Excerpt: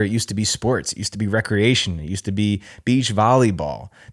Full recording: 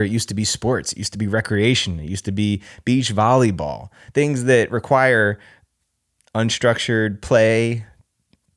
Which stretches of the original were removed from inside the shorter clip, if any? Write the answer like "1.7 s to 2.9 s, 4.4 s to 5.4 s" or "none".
none